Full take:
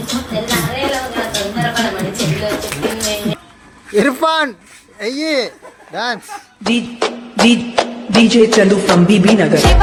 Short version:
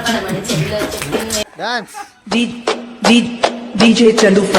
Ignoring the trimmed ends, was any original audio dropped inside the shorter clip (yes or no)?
yes